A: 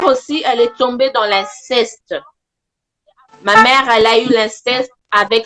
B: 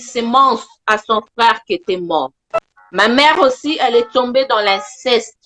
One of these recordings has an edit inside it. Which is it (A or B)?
B